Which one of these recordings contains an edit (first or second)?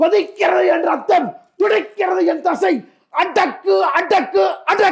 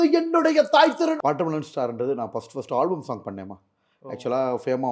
second